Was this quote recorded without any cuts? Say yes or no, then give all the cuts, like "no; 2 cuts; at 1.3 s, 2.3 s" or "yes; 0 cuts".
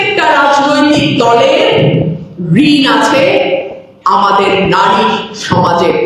yes; 0 cuts